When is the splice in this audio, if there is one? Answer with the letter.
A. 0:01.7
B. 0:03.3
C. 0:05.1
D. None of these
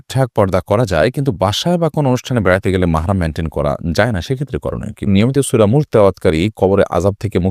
C